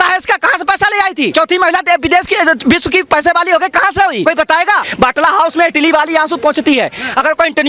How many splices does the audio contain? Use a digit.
2